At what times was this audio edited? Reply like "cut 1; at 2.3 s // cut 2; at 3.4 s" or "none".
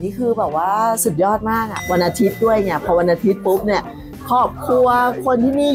cut 1; at 1.7 s